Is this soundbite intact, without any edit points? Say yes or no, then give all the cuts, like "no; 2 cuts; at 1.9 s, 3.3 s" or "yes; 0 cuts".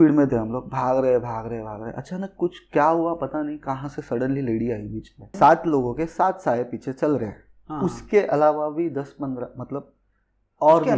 no; 1 cut; at 5.3 s